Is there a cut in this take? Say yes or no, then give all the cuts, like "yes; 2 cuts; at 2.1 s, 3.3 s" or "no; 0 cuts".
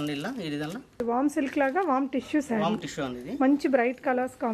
yes; 1 cut; at 1.0 s